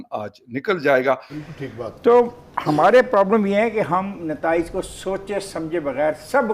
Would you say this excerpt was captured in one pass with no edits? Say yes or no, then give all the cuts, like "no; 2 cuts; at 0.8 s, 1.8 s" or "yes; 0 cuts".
no; 1 cut; at 1.3 s